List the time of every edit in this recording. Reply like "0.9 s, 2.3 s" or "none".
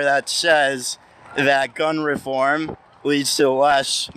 none